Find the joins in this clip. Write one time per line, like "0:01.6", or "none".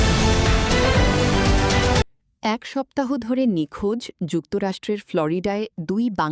0:02.1